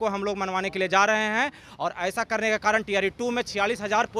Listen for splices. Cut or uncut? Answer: uncut